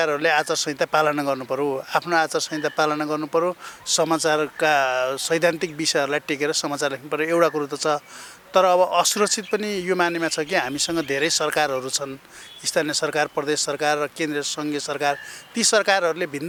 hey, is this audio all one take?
yes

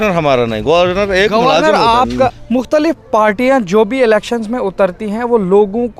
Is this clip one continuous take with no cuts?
no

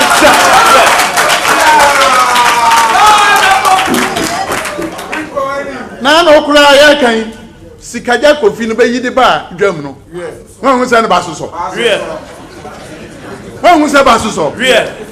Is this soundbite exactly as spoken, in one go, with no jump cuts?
yes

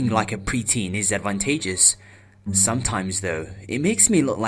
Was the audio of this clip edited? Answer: no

